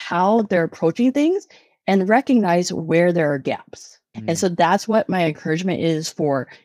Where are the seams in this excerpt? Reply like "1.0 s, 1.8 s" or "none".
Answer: 4.1 s